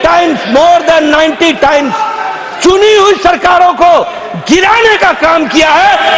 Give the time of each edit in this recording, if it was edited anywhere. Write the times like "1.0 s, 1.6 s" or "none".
none